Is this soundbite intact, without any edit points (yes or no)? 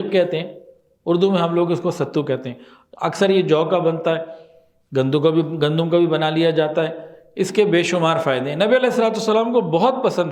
yes